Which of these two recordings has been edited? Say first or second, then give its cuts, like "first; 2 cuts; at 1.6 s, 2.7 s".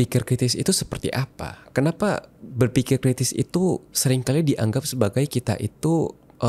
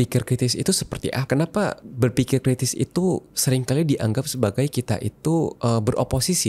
second; 3 cuts; at 1.2 s, 1.8 s, 5.6 s